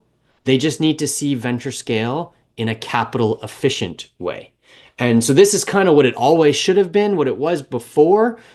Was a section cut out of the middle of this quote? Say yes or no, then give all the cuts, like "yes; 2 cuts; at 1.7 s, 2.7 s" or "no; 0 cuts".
no; 0 cuts